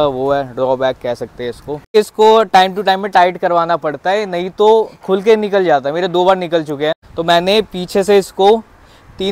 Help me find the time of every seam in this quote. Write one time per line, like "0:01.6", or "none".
0:01.9
0:07.0